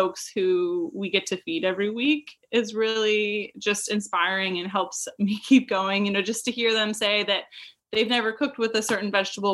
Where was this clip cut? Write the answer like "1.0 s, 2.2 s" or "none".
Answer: none